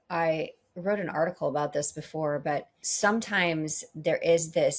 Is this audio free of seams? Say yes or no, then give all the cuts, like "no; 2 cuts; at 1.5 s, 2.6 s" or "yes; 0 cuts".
no; 1 cut; at 2.8 s